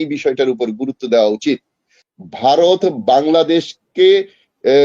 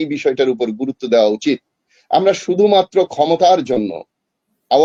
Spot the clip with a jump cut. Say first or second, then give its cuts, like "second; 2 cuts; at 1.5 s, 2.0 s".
first; 1 cut; at 2.0 s